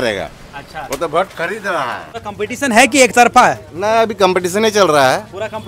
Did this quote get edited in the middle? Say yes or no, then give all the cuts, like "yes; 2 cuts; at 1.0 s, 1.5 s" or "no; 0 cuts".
yes; 1 cut; at 2.1 s